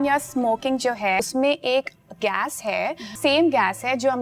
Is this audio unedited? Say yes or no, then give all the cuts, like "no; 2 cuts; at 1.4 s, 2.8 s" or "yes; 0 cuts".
no; 2 cuts; at 1.2 s, 3.1 s